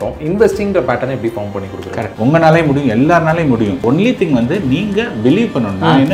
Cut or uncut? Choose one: cut